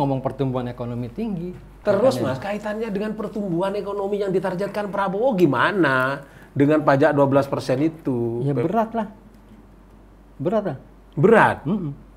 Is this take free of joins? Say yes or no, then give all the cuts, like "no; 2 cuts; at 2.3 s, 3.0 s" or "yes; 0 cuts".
no; 1 cut; at 1.7 s